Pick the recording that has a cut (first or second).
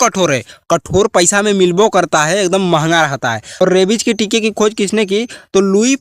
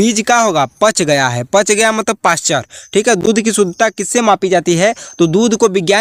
first